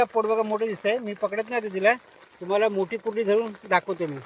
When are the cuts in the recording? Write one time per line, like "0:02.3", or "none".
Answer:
none